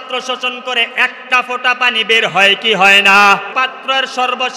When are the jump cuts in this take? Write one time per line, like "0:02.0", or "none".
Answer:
0:03.5